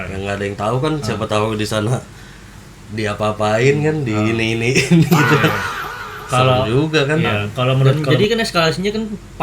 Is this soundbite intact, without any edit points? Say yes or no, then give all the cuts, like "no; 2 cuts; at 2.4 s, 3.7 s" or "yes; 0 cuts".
no; 1 cut; at 7.9 s